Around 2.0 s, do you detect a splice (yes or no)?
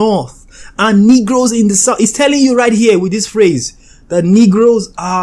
no